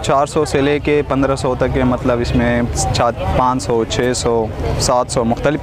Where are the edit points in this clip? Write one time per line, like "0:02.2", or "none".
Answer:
none